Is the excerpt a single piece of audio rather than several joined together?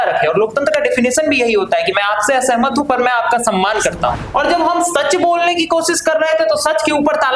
no; 1 cut; at 4.2 s

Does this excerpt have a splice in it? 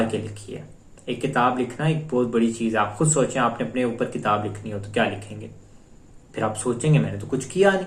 no; 0 cuts

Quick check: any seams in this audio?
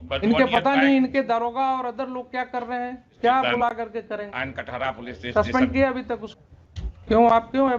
yes; 2 cuts; at 3.1 s, 6.3 s

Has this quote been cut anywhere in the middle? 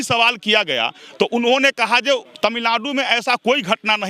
yes; 1 cut; at 2.3 s

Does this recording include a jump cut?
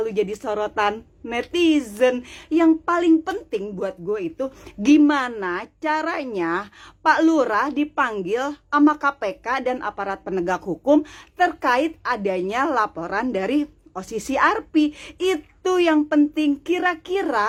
no; 0 cuts

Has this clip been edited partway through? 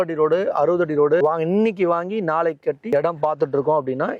yes; 2 cuts; at 1.2 s, 2.8 s

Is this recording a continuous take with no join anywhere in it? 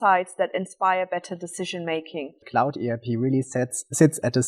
no; 1 cut; at 2.4 s

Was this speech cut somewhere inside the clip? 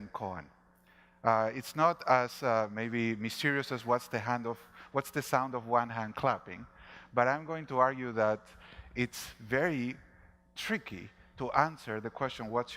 yes; 1 cut; at 4.1 s

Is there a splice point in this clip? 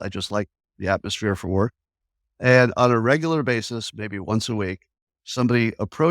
no; 0 cuts

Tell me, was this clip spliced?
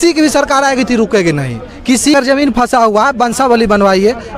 yes; 1 cut; at 2.1 s

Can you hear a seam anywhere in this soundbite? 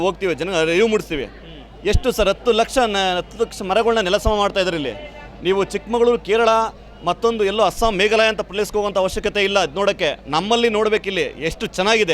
no; 0 cuts

